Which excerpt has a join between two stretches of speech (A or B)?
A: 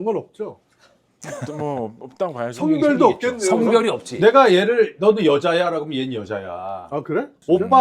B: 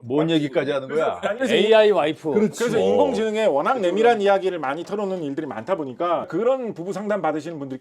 A